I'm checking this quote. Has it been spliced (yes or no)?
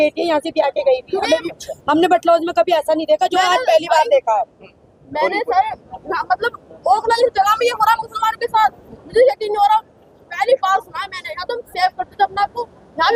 no